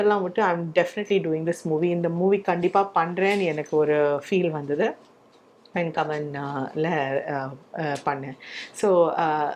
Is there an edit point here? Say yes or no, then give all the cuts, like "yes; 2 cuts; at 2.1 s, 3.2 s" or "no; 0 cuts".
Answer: no; 0 cuts